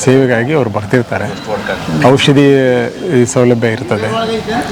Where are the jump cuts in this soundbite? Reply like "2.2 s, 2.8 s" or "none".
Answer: none